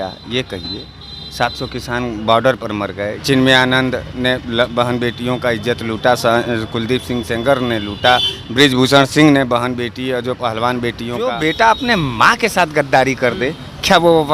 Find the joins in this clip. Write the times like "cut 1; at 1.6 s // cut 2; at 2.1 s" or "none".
cut 1; at 3.2 s // cut 2; at 11.3 s